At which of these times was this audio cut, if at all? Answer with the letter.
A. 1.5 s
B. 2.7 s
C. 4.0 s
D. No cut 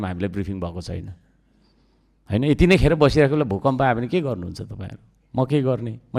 D